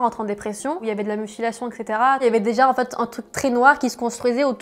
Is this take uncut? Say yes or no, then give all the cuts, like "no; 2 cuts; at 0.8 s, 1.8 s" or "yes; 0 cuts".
no; 2 cuts; at 0.8 s, 2.2 s